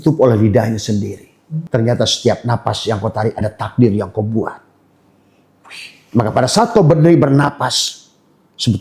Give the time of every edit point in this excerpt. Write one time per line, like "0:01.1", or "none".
0:01.7